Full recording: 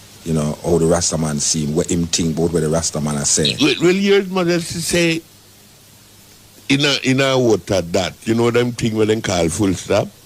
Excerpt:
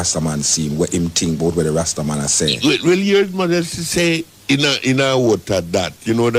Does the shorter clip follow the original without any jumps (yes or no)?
no